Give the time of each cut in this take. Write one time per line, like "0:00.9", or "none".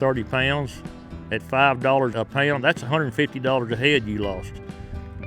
0:02.1